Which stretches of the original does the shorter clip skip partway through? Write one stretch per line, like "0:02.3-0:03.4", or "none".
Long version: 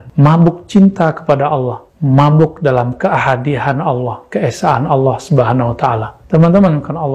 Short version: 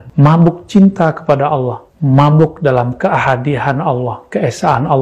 none